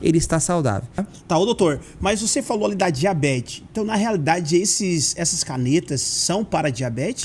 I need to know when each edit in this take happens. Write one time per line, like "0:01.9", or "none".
0:01.1